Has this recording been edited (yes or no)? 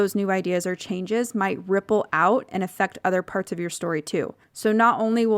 yes